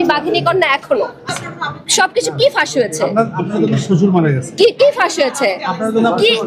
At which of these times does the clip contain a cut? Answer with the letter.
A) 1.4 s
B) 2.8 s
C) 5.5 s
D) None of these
A